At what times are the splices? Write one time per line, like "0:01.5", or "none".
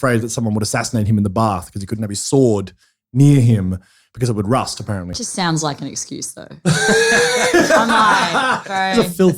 0:05.2

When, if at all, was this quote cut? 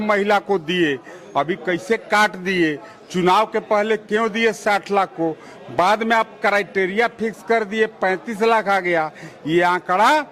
none

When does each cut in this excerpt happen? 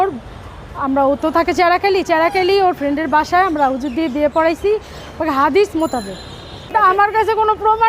0:06.7

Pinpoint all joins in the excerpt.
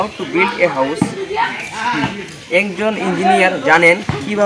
none

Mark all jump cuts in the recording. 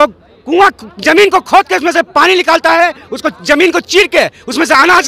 none

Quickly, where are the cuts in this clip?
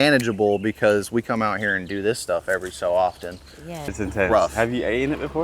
0:03.9

